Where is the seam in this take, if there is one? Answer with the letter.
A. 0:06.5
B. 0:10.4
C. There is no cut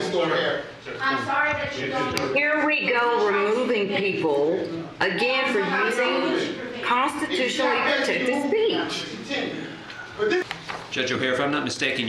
B